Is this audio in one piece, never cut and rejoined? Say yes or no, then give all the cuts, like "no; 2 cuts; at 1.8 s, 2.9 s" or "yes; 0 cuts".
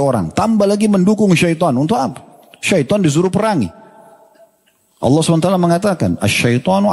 yes; 0 cuts